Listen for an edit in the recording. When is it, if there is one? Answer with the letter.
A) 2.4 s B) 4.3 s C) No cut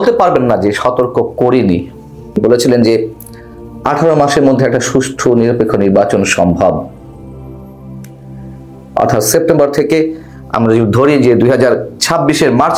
A